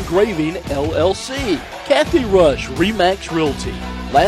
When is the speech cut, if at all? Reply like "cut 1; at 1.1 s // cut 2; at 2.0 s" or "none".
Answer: cut 1; at 1.7 s